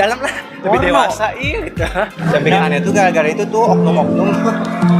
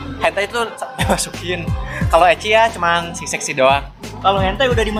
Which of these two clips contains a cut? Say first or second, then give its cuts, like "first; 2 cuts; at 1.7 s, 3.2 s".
first; 1 cut; at 2.2 s